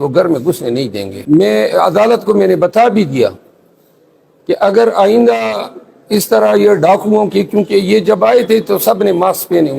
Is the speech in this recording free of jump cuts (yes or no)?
no